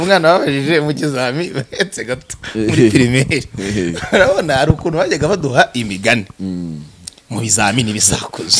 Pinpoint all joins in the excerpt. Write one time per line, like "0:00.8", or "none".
none